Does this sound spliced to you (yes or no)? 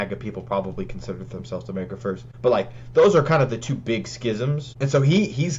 yes